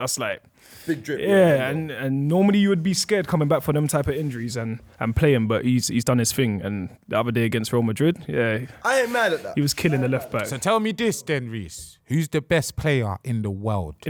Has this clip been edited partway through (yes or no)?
no